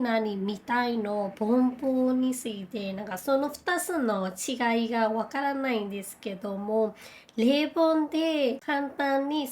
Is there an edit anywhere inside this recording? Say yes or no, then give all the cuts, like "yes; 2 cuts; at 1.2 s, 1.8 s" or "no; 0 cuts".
yes; 1 cut; at 8.6 s